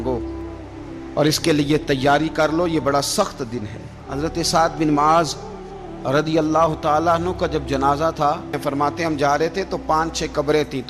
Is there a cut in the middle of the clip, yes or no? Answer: yes